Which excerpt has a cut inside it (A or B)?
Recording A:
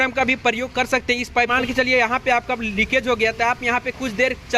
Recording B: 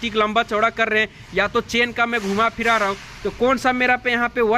A